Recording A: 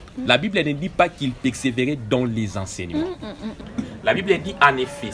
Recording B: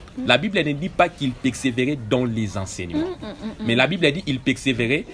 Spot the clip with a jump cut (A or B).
A